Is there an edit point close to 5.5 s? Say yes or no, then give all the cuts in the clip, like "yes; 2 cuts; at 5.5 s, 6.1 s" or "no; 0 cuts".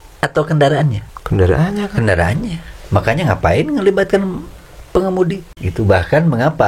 yes; 1 cut; at 5.5 s